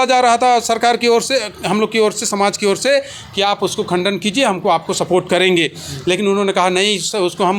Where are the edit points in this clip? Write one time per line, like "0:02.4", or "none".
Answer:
none